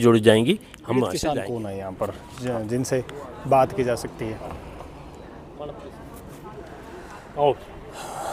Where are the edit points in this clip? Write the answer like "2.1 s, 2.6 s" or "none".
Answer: 1.2 s